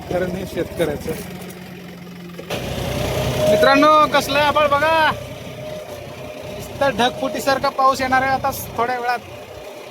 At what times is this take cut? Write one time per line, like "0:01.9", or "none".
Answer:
0:02.6